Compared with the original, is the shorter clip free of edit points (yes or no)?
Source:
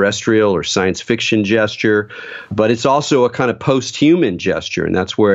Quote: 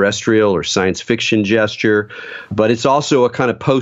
yes